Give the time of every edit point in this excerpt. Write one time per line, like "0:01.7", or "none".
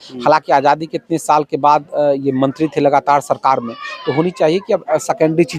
none